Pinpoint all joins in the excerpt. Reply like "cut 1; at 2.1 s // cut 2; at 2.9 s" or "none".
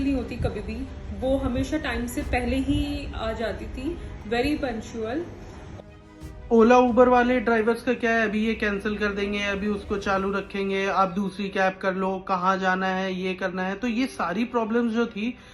cut 1; at 5.8 s